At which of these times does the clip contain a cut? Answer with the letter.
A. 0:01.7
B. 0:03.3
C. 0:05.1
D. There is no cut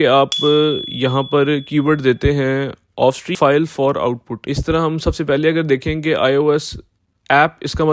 B